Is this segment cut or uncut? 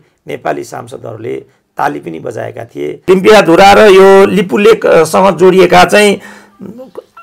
cut